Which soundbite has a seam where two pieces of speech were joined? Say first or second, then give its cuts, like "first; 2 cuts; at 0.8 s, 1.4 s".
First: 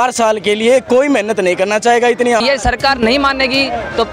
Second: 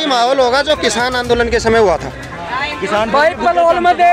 first; 1 cut; at 2.4 s